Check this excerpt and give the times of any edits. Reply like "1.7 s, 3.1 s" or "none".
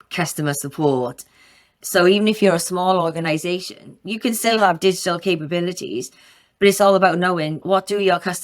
1.7 s

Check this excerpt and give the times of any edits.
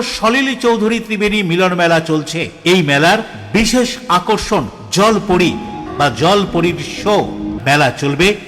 5.8 s, 7.5 s

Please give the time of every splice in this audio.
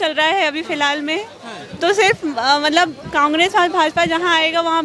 none

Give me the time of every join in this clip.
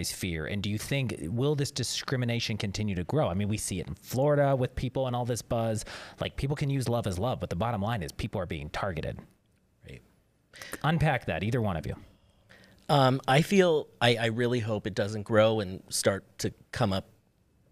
none

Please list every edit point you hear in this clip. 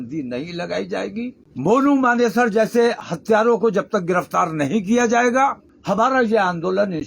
1.4 s, 5.7 s

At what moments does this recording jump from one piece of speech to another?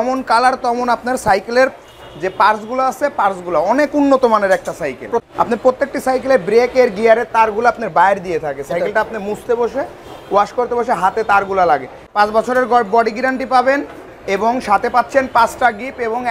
5.3 s, 12.0 s

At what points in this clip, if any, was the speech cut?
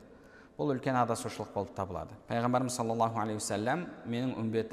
2.1 s

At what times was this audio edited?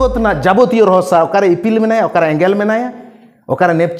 none

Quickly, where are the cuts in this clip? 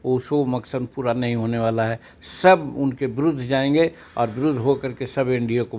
none

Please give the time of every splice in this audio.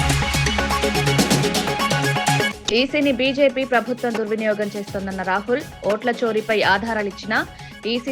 none

